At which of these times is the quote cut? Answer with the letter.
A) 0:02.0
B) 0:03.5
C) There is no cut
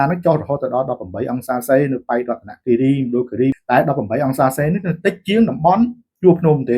B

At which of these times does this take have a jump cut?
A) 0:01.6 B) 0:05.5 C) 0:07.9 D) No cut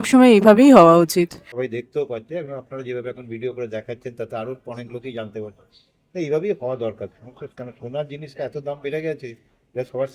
A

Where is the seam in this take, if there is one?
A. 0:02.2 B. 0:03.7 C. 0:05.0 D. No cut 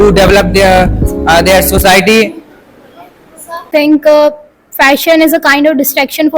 B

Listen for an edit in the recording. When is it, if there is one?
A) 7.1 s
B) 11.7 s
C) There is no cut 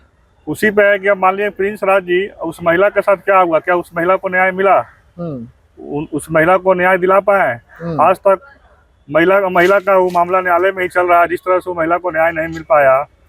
C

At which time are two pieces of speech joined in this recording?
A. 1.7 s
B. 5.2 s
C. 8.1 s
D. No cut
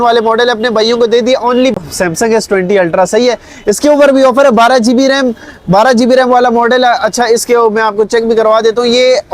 A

